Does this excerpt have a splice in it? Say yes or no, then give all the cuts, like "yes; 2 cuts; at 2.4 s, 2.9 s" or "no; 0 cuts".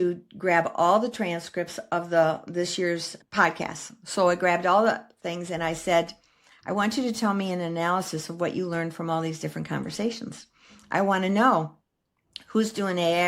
no; 0 cuts